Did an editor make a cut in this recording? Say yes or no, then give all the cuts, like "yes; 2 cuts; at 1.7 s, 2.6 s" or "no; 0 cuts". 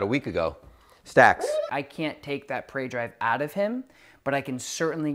yes; 1 cut; at 1.7 s